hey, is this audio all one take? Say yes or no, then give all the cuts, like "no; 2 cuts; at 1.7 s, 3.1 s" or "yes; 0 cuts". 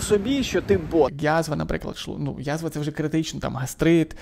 no; 1 cut; at 1.2 s